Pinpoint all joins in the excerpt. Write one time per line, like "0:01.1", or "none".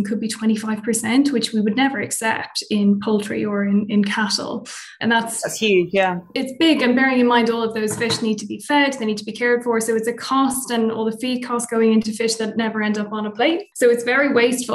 0:04.9
0:06.3
0:13.7